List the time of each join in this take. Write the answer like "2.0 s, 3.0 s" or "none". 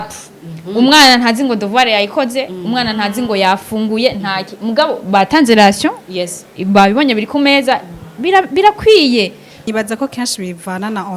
9.7 s

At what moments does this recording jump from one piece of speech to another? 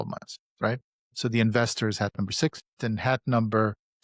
2.8 s

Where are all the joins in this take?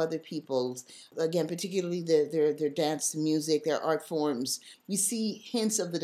1.1 s, 4.7 s

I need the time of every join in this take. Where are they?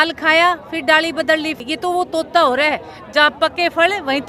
1.6 s

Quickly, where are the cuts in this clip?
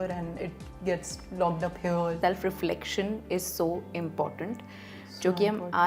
2.2 s

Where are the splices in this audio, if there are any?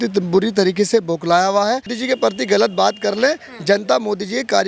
1.9 s

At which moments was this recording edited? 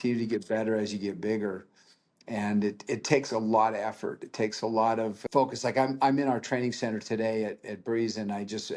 5.2 s

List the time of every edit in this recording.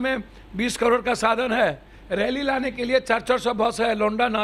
none

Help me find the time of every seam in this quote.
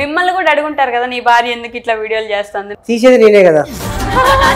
2.6 s

